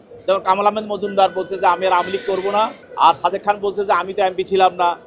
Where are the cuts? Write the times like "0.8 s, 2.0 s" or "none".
2.8 s